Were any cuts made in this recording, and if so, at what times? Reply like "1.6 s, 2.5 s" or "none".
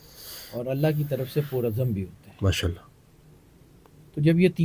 none